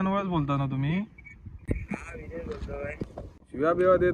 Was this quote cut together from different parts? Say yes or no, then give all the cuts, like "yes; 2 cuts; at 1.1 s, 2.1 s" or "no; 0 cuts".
yes; 1 cut; at 3.1 s